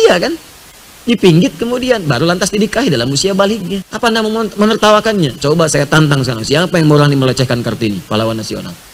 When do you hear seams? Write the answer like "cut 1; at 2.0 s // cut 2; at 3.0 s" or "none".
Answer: cut 1; at 3.9 s